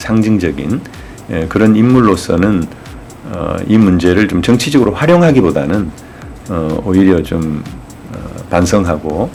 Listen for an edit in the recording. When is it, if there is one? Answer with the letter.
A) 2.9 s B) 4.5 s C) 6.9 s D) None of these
D